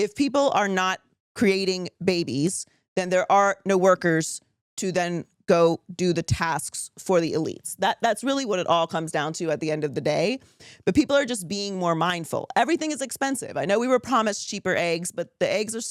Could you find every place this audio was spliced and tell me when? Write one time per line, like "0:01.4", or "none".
none